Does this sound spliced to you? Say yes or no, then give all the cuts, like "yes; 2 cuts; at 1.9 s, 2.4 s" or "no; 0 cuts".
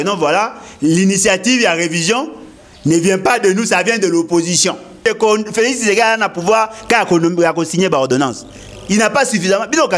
yes; 1 cut; at 5.0 s